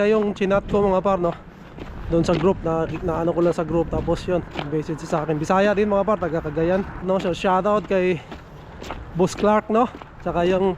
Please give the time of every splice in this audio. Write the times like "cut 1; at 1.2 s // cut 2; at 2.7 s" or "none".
cut 1; at 7.0 s